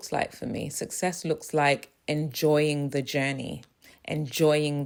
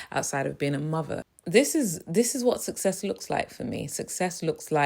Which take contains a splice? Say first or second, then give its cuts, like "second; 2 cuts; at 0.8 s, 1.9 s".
second; 1 cut; at 1.3 s